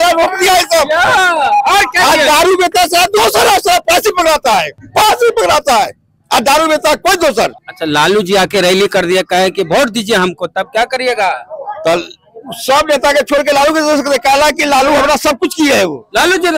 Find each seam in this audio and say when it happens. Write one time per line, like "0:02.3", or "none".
0:04.8
0:07.6